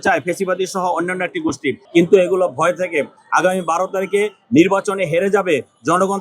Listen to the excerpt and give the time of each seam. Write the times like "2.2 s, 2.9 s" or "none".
1.8 s